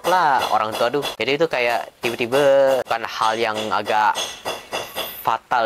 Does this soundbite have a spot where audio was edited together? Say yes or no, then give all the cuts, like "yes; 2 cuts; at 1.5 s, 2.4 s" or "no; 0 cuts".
no; 0 cuts